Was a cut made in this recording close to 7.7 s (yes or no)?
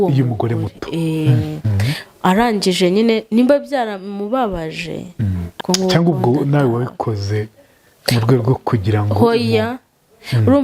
no